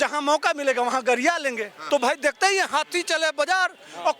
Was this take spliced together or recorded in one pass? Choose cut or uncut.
cut